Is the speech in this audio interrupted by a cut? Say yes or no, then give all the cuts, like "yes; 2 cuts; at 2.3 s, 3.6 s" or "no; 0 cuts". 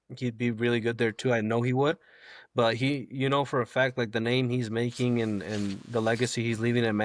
no; 0 cuts